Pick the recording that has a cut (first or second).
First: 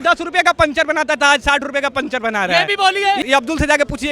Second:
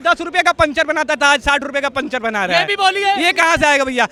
first